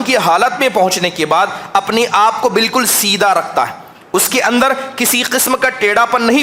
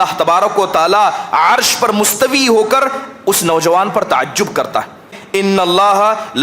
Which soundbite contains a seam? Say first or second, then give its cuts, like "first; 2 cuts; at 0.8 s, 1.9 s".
second; 1 cut; at 5.2 s